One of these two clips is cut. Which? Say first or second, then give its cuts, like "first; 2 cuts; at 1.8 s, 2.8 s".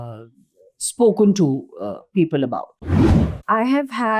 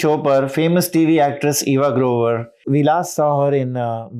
first; 1 cut; at 3.2 s